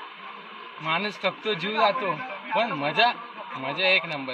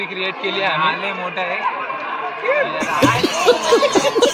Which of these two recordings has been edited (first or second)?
second